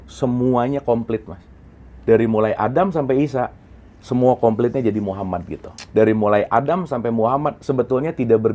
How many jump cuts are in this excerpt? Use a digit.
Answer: 1